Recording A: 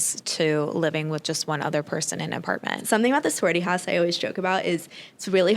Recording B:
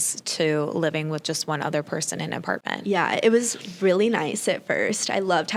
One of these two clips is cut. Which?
A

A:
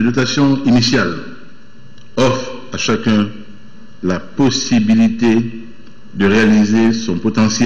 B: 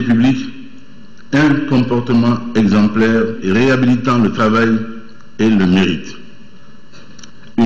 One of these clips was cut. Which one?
B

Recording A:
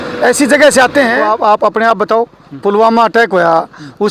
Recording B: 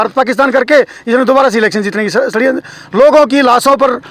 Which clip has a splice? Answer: A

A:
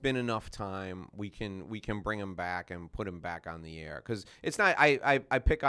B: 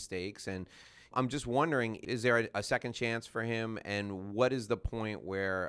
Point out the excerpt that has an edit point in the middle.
B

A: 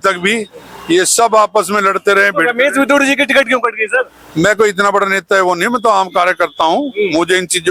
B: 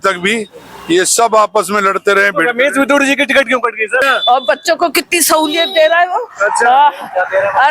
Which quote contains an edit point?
B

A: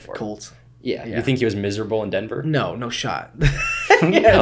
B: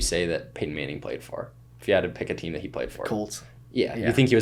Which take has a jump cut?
B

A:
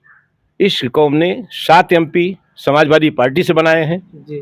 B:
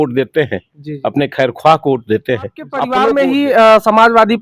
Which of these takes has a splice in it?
B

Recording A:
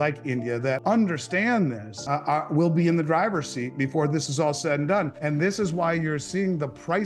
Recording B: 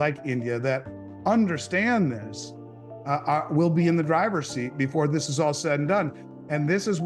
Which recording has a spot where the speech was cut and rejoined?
A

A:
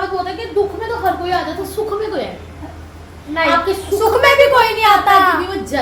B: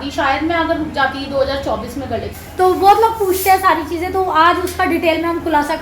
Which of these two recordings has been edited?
B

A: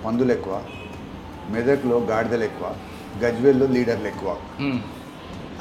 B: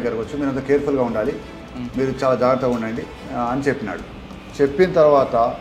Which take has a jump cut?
B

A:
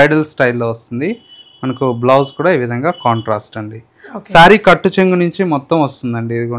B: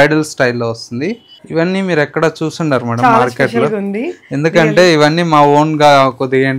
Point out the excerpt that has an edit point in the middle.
B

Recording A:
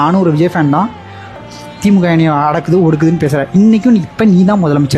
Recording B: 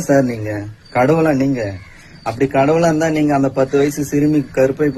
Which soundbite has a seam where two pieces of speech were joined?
A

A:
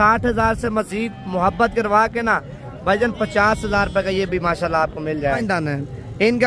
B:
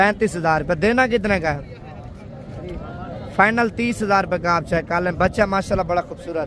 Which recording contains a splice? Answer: A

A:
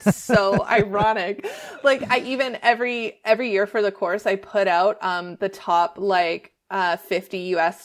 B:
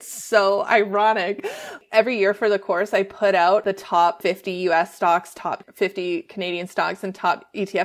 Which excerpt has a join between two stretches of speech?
B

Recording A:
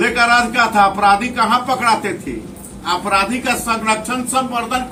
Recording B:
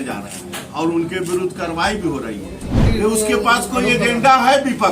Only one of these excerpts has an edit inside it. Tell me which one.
B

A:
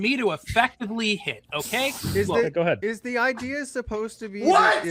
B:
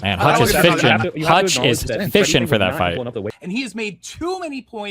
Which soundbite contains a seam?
B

